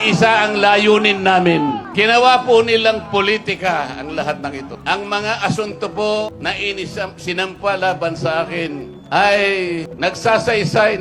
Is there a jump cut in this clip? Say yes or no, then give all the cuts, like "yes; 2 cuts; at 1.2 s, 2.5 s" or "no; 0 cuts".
yes; 5 cuts; at 1.9 s, 4.7 s, 6.3 s, 8.9 s, 9.9 s